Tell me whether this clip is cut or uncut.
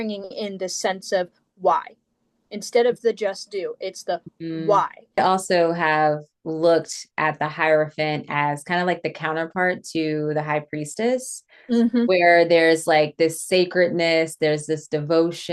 cut